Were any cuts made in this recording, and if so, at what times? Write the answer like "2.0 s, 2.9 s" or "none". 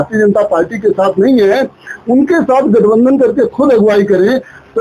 none